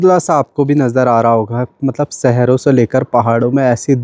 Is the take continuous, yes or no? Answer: yes